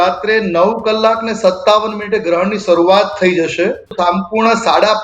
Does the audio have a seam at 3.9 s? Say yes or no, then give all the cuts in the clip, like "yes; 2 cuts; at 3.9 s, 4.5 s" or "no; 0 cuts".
yes; 1 cut; at 3.9 s